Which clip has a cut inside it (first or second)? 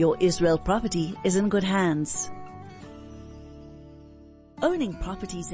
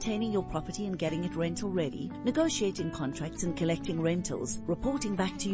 first